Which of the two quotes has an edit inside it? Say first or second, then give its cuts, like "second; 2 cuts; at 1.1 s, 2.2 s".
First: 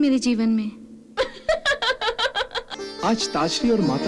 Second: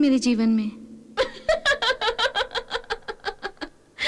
first; 1 cut; at 2.7 s